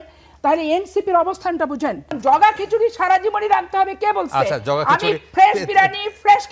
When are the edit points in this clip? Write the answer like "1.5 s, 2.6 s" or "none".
2.1 s